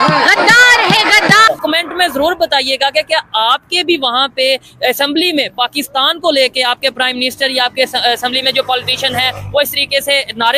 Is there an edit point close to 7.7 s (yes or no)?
no